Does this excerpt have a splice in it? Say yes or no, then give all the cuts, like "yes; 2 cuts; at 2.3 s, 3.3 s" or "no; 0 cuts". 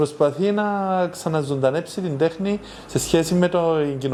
no; 0 cuts